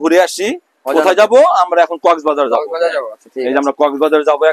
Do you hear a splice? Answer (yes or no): no